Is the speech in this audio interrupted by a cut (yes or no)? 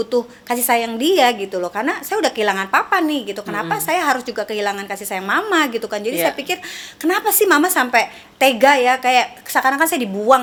no